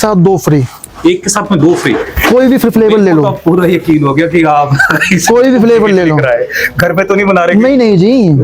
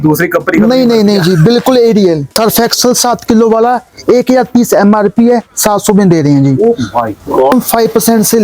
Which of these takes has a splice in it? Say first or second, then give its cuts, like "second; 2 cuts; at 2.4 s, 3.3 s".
second; 2 cuts; at 2.3 s, 7.5 s